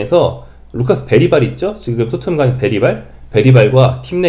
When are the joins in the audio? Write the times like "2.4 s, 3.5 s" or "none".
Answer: none